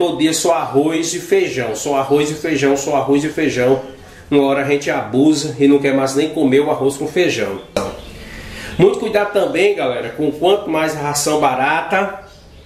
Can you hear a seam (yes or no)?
yes